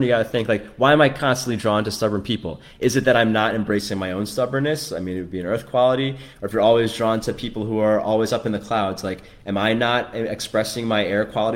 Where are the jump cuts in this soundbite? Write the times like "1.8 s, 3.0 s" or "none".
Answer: none